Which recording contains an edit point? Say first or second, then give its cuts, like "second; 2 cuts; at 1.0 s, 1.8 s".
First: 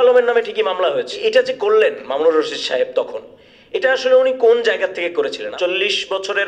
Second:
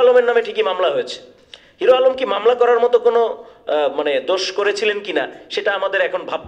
first; 2 cuts; at 1.1 s, 5.5 s